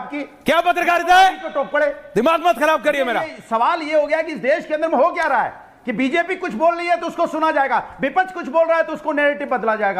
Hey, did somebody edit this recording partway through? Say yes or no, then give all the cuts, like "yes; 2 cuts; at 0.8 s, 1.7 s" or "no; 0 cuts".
yes; 1 cut; at 3.1 s